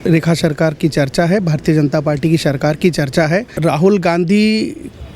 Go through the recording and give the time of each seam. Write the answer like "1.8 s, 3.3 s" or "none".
3.5 s